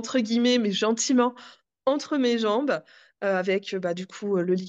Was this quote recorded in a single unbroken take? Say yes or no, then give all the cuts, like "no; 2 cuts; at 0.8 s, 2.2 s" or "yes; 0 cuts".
yes; 0 cuts